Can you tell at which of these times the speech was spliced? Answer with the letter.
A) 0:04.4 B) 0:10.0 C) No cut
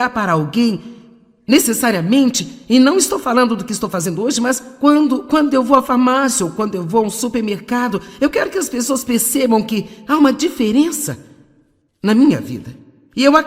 A